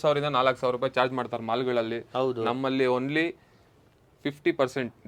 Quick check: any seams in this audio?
no; 0 cuts

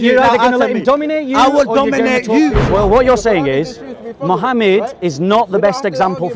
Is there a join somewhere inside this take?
yes; 1 cut; at 2.6 s

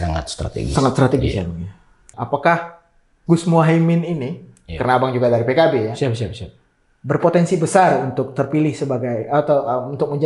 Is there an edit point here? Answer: yes; 1 cut; at 2.1 s

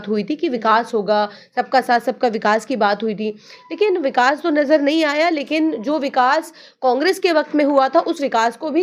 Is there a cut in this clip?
no; 0 cuts

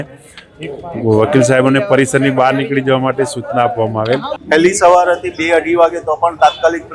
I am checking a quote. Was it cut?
yes; 1 cut; at 4.3 s

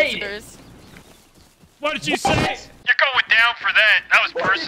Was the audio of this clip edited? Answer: no; 0 cuts

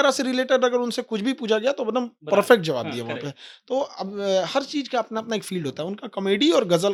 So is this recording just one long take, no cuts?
yes; 0 cuts

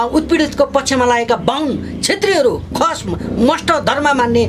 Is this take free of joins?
yes; 0 cuts

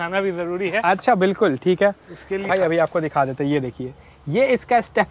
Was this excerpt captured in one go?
no; 1 cut; at 2.5 s

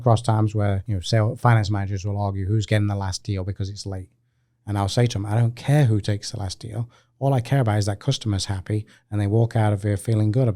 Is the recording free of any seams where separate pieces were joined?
no; 1 cut; at 0.9 s

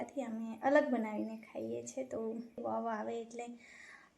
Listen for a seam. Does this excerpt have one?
yes; 1 cut; at 2.6 s

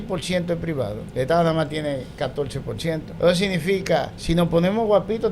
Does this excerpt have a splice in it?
yes; 3 cuts; at 1.0 s, 3.1 s, 4.2 s

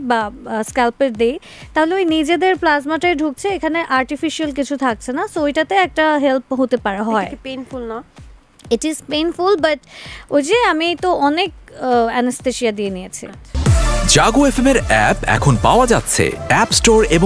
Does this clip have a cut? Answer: yes; 1 cut; at 13.6 s

